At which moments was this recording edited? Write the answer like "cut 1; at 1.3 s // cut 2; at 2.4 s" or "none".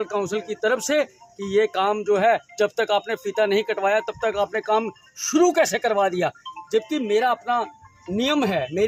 none

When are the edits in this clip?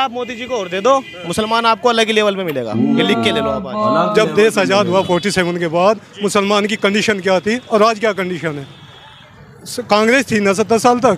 cut 1; at 3.9 s

